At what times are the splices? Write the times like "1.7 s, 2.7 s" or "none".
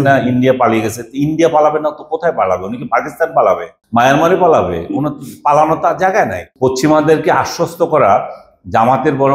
3.7 s, 6.4 s